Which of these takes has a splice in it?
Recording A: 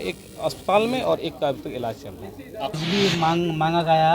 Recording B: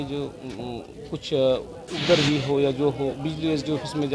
A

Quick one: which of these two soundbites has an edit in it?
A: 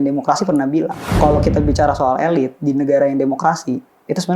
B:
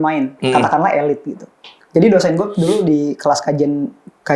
A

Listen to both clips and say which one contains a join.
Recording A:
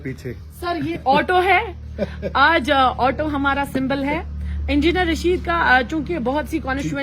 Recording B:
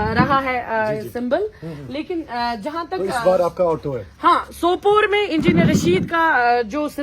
A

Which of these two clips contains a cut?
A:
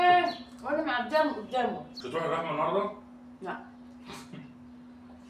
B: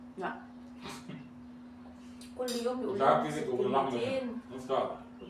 A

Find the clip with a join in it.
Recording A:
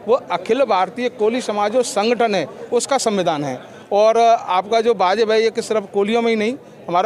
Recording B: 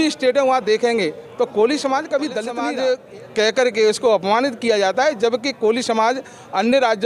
B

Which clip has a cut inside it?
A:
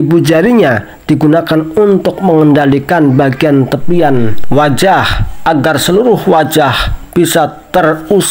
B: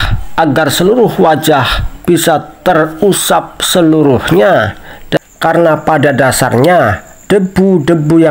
B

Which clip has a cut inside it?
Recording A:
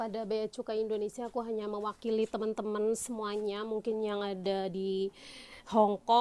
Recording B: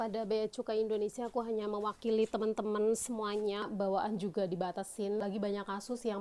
B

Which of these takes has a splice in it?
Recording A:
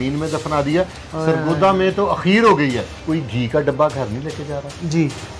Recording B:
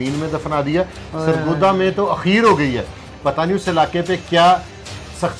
A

